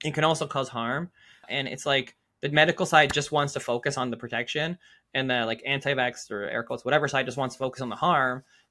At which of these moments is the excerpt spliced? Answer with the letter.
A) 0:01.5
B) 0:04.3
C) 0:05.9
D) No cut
A